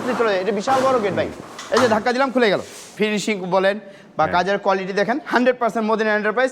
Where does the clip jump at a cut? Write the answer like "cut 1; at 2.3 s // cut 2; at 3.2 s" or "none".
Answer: cut 1; at 2.9 s